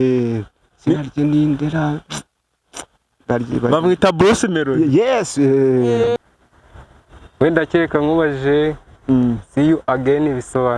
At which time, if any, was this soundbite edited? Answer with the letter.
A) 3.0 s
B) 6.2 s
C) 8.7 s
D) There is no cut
B